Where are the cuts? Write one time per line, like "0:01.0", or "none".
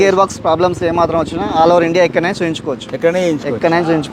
none